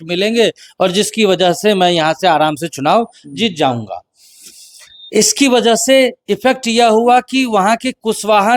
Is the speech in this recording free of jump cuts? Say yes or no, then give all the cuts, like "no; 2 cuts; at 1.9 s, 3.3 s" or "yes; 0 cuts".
yes; 0 cuts